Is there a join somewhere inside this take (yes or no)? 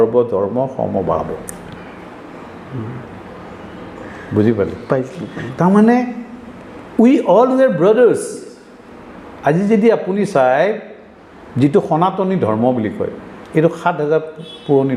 no